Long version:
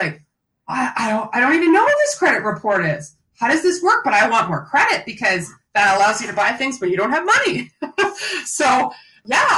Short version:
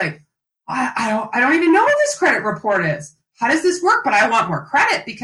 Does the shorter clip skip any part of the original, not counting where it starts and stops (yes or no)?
no